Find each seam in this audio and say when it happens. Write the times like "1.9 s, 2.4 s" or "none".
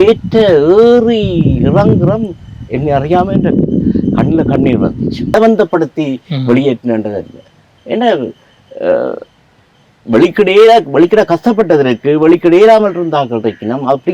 5.3 s